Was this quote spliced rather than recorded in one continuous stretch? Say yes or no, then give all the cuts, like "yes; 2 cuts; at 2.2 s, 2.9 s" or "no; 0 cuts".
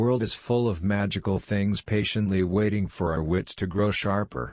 no; 0 cuts